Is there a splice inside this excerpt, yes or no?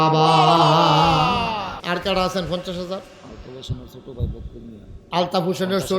yes